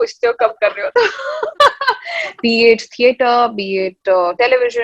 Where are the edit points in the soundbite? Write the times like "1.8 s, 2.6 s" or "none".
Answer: 2.4 s